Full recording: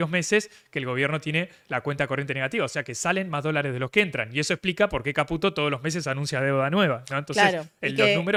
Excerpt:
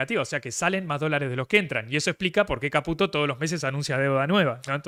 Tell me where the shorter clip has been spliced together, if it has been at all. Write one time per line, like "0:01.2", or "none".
none